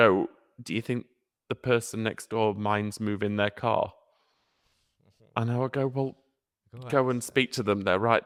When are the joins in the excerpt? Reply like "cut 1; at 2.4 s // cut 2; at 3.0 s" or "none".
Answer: none